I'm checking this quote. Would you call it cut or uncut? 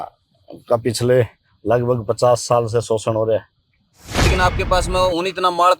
cut